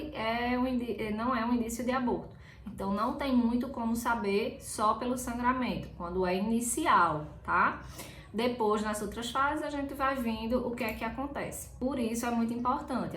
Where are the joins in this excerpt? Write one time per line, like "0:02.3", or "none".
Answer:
0:11.8